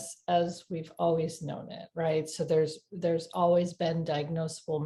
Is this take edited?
no; 0 cuts

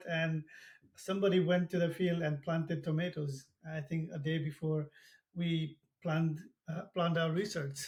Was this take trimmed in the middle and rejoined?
no; 0 cuts

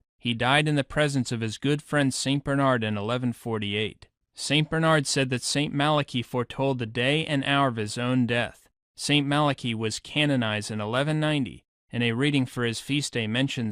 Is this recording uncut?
yes; 0 cuts

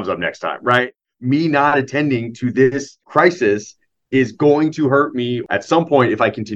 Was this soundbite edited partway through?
yes; 3 cuts; at 0.9 s, 3.0 s, 5.4 s

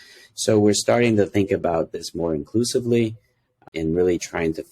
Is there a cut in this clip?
yes; 1 cut; at 3.6 s

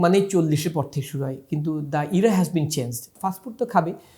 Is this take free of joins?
no; 1 cut; at 3.0 s

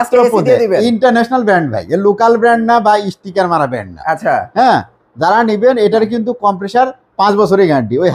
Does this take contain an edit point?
no; 0 cuts

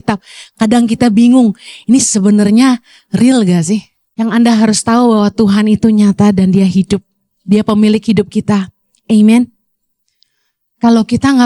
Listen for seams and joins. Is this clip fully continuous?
no; 1 cut; at 4.0 s

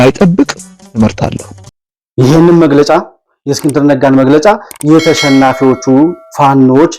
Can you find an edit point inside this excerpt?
no; 0 cuts

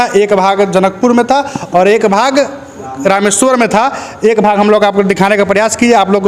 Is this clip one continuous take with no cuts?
yes; 0 cuts

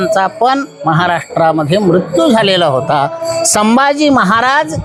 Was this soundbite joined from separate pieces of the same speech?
no; 0 cuts

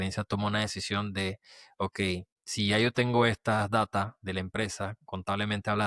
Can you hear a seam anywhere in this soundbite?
yes; 1 cut; at 2.4 s

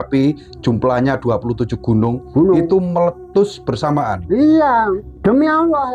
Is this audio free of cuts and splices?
no; 1 cut; at 5.0 s

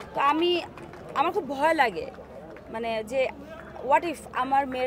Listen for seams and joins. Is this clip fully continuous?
yes; 0 cuts

